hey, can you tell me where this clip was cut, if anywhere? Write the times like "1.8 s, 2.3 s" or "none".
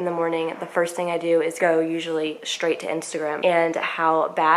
1.5 s, 3.4 s

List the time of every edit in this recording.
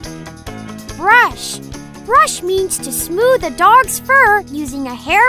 1.0 s

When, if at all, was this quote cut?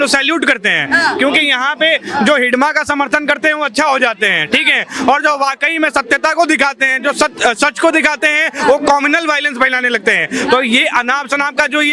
none

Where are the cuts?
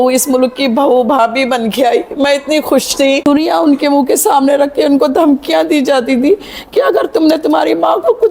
3.2 s

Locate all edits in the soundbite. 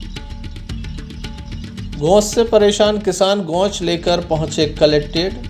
2.0 s

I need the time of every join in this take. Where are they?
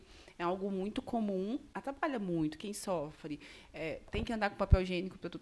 1.7 s

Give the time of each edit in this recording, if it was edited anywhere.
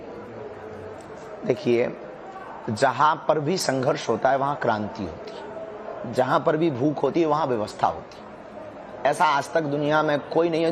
3.9 s

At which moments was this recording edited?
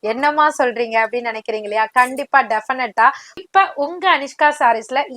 3.4 s

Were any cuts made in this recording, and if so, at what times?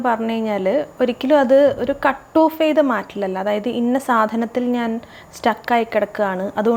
none

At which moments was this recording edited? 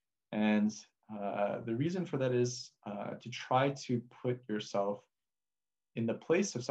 none

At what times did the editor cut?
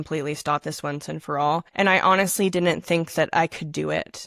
1.7 s

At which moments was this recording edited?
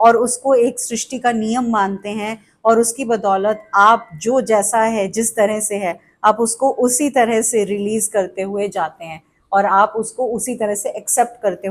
none

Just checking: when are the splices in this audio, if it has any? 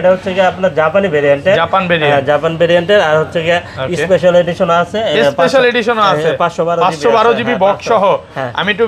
none

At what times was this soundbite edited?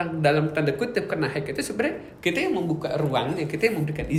none

